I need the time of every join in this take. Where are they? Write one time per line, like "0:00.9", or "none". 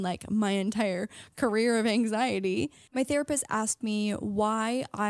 0:02.8

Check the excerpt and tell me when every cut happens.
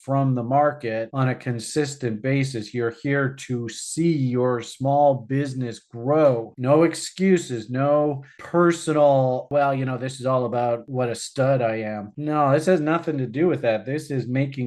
0:09.5
0:10.9

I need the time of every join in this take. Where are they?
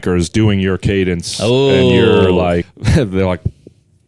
0:02.6

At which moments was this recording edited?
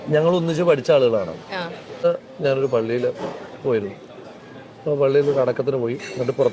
0:02.0

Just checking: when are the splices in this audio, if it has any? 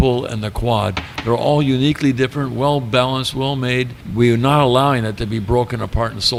none

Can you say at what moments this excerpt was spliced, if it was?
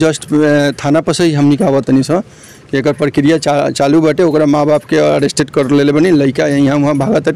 none

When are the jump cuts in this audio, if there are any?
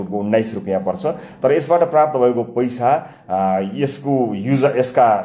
none

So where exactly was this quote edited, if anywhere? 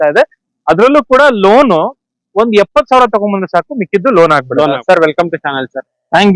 0:04.8

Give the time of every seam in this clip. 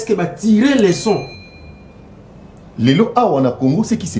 0:01.4

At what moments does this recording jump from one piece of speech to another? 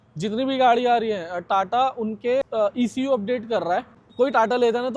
0:02.5
0:04.0

